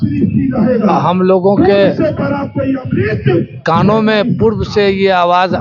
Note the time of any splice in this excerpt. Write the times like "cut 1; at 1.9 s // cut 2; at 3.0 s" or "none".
none

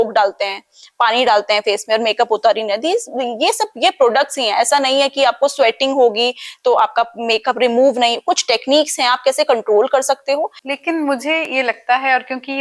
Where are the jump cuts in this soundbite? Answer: cut 1; at 10.6 s

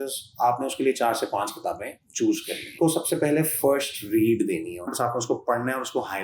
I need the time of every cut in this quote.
cut 1; at 2.8 s // cut 2; at 4.9 s

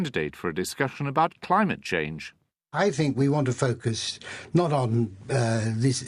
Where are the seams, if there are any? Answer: cut 1; at 5.2 s

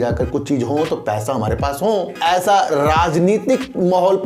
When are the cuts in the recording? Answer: cut 1; at 2.1 s

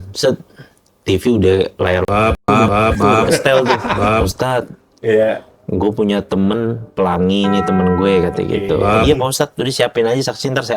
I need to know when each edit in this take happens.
cut 1; at 4.0 s // cut 2; at 9.0 s

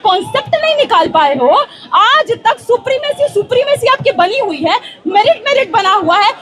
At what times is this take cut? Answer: none

